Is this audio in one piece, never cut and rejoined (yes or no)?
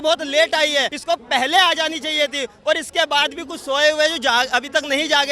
no